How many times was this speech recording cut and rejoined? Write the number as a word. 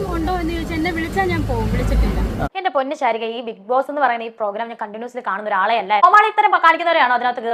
two